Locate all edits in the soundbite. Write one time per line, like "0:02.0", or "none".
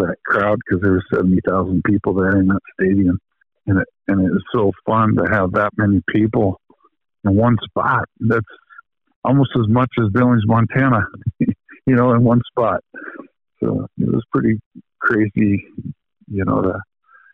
none

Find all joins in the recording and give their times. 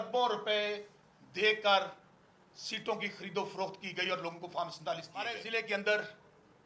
0:05.4

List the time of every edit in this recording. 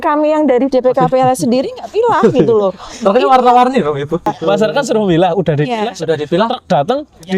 0:04.3

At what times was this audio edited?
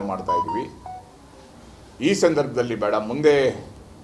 none

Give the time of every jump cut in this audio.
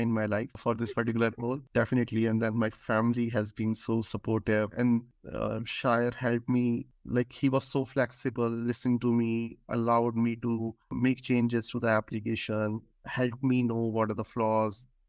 none

